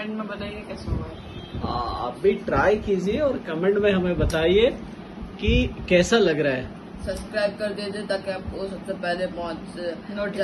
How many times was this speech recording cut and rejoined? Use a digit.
0